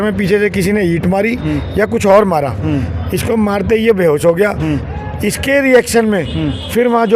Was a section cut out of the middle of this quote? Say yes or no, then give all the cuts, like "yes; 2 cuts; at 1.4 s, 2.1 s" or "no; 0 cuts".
no; 0 cuts